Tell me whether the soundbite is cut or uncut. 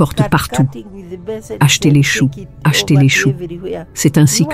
cut